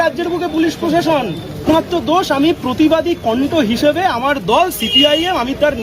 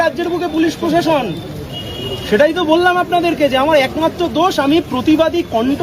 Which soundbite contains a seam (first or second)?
first